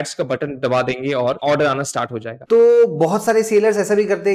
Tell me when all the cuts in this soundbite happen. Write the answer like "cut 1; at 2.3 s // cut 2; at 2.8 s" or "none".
cut 1; at 1.4 s // cut 2; at 2.3 s